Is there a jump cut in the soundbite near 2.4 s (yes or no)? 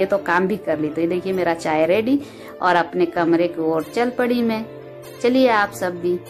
no